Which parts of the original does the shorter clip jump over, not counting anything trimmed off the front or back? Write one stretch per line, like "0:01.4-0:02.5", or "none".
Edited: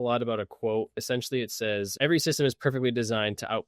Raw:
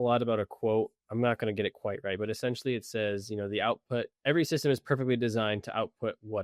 0:01.0-0:02.3
0:03.2-0:04.2